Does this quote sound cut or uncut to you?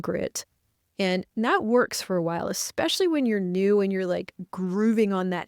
uncut